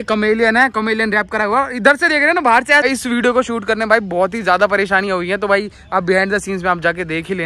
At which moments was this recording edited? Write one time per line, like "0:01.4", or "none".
0:02.9